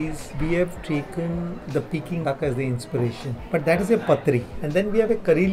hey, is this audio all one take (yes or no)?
yes